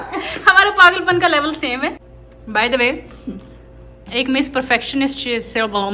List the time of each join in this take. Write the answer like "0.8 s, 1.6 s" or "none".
2.1 s